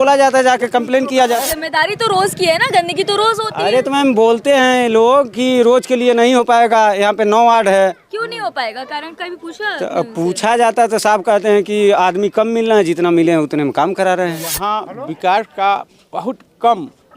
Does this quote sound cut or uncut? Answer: cut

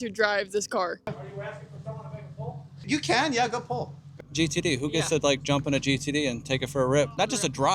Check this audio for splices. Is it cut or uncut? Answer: cut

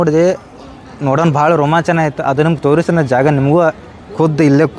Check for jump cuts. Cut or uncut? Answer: uncut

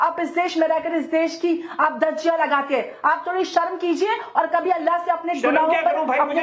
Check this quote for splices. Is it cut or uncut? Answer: uncut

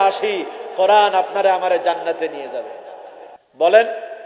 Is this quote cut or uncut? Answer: uncut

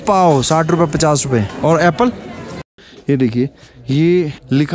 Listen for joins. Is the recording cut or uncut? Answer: cut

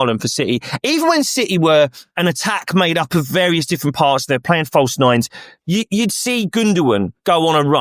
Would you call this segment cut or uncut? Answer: uncut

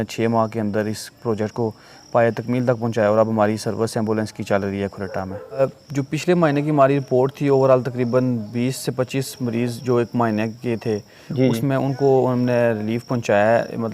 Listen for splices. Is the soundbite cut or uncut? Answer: cut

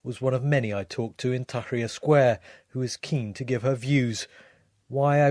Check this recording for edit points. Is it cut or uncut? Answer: cut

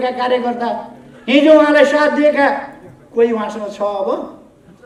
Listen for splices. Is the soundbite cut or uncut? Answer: uncut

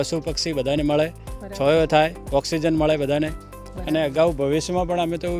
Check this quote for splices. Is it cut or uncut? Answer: cut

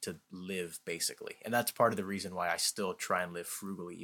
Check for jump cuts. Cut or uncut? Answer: uncut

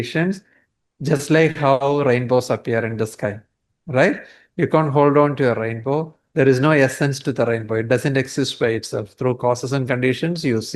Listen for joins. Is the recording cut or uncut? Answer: uncut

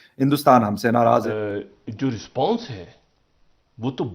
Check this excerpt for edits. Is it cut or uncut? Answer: cut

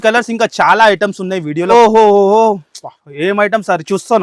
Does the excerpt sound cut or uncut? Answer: cut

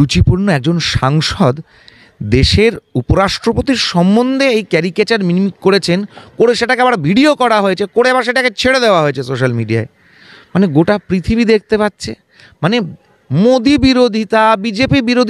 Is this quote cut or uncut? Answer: uncut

